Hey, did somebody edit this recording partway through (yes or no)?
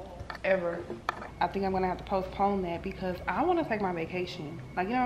yes